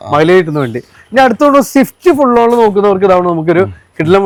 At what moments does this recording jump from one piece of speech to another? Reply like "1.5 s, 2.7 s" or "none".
none